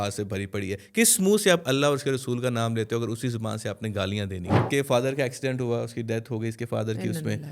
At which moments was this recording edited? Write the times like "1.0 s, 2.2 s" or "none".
4.7 s

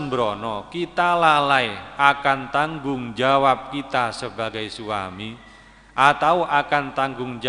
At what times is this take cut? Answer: none

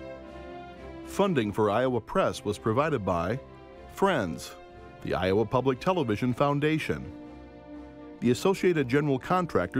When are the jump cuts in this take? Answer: 1.1 s

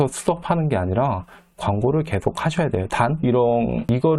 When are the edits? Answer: none

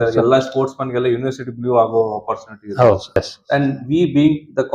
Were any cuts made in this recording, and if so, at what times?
3.2 s

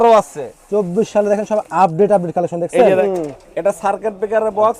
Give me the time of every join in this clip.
3.0 s

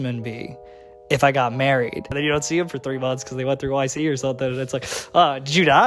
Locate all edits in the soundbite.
2.1 s

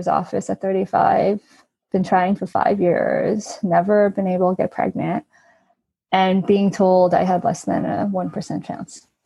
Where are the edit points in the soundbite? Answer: none

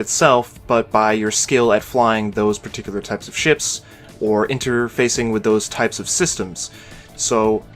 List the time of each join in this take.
4.2 s

